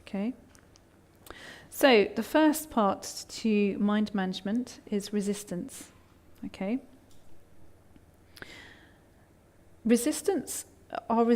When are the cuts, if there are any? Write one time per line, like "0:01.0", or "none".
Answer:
0:04.2